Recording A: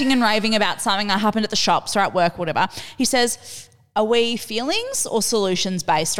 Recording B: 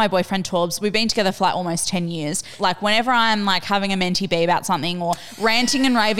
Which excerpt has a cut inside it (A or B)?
B